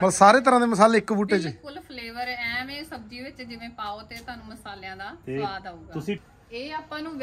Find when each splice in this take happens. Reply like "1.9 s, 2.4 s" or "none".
6.2 s